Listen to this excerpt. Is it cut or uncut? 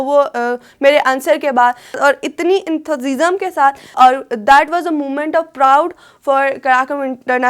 cut